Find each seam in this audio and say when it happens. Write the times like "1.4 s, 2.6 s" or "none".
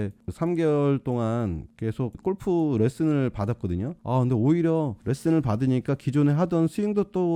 none